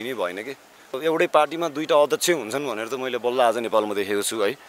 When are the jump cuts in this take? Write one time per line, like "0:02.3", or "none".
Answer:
0:00.9